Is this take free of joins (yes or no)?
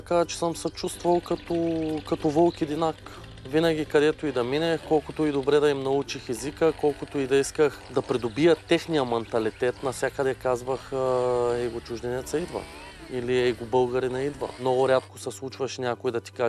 no